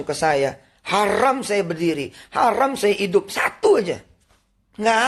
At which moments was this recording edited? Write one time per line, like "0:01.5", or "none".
none